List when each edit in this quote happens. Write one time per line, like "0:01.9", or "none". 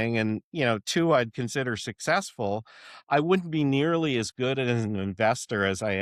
none